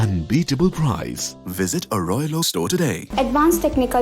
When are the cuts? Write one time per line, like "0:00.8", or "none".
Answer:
0:03.0